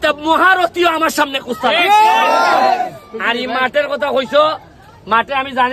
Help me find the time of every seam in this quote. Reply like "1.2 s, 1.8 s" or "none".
none